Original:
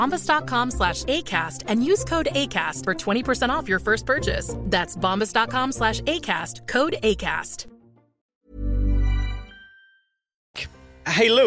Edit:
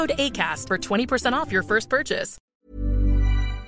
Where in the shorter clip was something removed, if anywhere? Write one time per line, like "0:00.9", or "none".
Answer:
0:02.3

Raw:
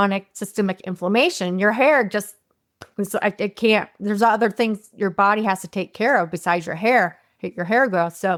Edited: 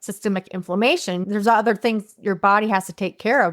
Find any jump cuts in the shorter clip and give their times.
0:01.2

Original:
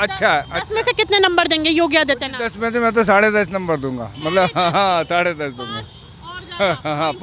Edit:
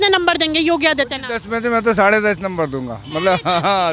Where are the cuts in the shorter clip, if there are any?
none

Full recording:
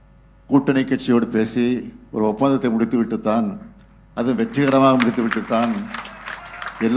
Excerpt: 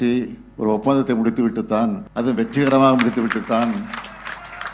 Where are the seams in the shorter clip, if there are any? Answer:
0:02.1

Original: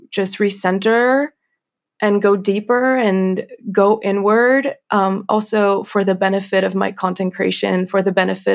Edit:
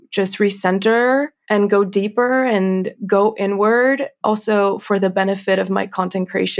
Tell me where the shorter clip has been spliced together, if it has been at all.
0:01.4
0:02.9
0:04.2

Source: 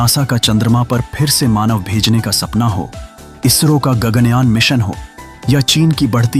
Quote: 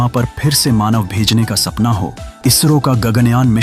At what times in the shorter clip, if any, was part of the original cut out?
0:02.2

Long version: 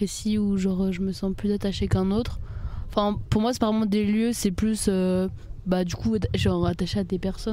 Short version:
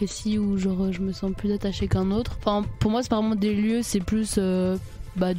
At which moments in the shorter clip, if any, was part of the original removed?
0:02.3

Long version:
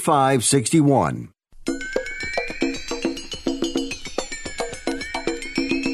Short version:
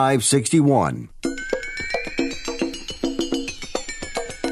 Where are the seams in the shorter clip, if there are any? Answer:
0:01.1

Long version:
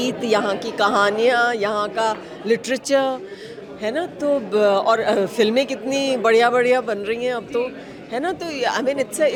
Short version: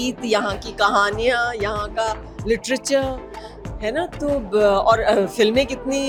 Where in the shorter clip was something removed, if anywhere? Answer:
none

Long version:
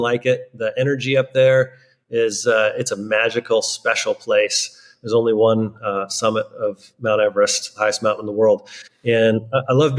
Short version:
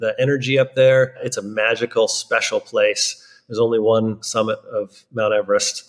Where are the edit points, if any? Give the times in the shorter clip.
0:01.3
0:04.2

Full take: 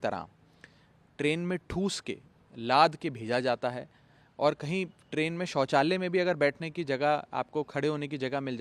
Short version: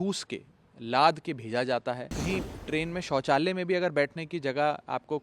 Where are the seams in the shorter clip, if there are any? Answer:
0:02.2

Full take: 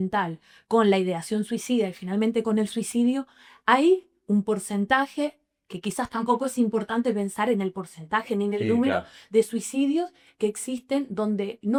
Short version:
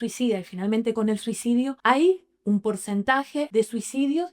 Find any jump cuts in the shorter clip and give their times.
0:01.8
0:03.5

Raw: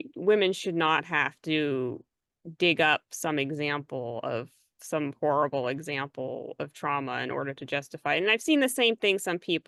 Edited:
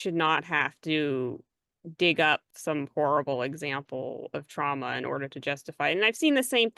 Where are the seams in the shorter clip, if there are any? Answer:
0:02.5

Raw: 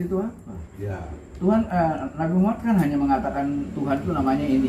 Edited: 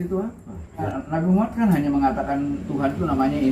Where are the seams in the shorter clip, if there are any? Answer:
0:00.9

